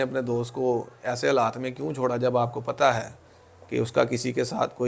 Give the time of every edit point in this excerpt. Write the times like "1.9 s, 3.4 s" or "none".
none